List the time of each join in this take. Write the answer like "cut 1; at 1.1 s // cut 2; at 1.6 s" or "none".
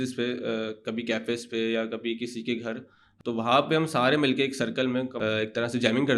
cut 1; at 3.0 s // cut 2; at 5.1 s